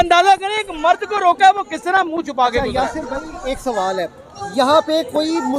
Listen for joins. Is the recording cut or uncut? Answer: uncut